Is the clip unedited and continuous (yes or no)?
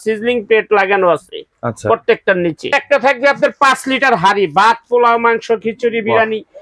no